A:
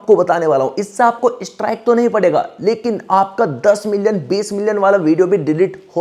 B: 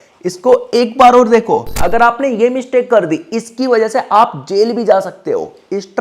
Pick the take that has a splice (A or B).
B